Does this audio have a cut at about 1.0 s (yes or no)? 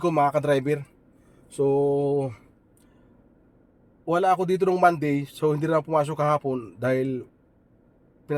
no